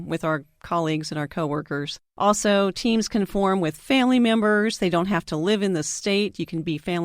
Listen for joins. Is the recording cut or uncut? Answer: cut